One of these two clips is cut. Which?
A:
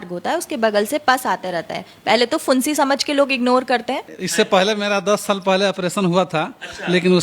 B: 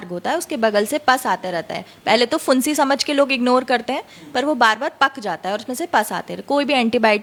A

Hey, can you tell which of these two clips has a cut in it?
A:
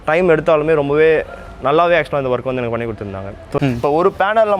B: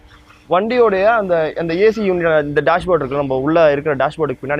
A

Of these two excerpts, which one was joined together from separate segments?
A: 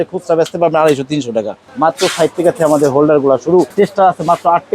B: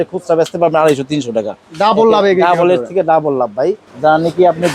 A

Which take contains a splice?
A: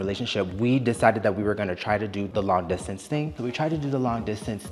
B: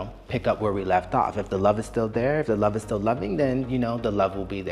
A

